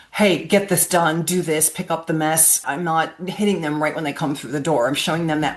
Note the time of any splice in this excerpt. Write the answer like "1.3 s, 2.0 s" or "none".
2.6 s

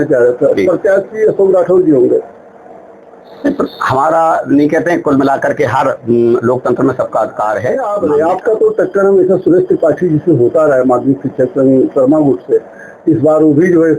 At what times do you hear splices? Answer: 7.8 s

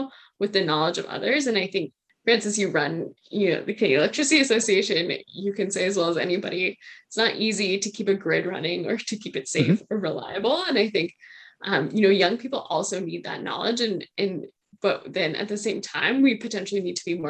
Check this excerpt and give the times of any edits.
2.0 s

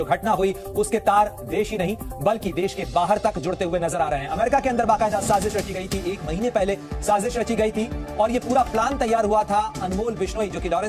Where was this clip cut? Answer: none

